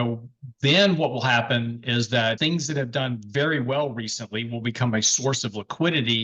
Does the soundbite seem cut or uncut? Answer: cut